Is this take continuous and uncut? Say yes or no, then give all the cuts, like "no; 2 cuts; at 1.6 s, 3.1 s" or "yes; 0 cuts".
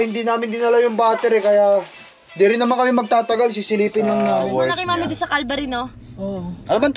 no; 1 cut; at 4.2 s